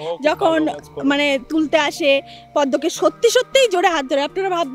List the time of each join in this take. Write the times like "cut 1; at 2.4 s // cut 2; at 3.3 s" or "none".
none